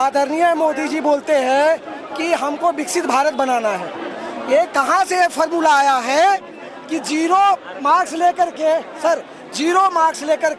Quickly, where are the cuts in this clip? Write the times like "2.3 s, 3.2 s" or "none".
none